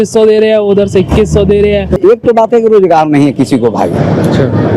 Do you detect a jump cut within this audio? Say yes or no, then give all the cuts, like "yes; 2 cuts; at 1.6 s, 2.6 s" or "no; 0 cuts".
yes; 1 cut; at 2.0 s